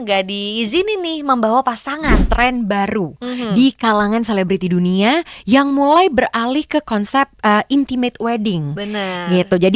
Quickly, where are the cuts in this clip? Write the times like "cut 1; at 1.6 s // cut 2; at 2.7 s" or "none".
cut 1; at 2.2 s